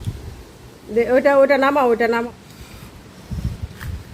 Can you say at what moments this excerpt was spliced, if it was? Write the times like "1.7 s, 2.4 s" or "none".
2.3 s